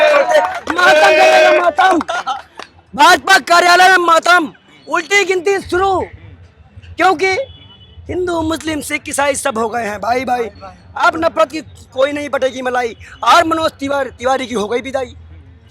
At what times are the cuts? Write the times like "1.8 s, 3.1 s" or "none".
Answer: none